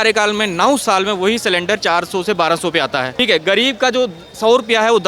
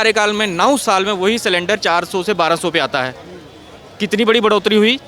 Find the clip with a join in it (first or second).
first